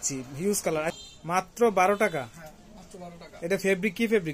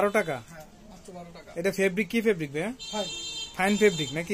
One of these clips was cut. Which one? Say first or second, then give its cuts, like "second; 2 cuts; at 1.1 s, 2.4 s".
first; 1 cut; at 0.9 s